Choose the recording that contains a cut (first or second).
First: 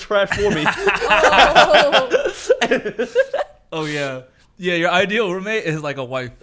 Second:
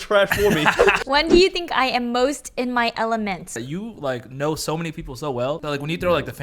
second